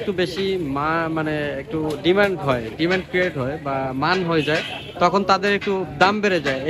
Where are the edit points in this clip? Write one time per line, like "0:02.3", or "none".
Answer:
none

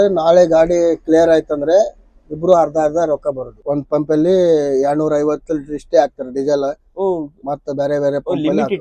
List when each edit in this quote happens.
0:03.5

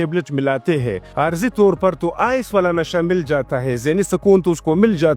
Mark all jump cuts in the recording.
0:01.1

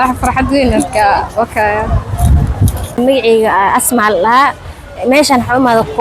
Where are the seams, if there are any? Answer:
0:03.0

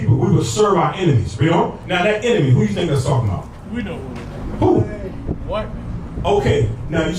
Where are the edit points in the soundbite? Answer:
none

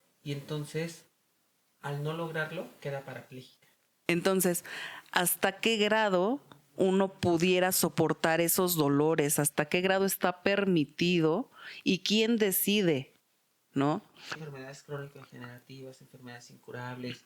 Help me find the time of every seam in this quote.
0:04.1
0:14.3

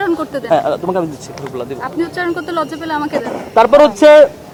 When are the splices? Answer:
none

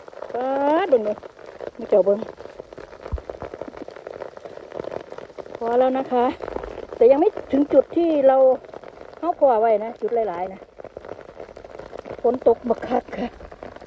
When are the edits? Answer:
none

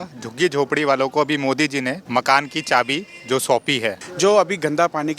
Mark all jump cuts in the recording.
0:02.0
0:04.0

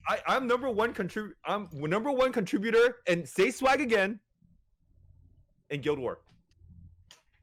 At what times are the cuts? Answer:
none

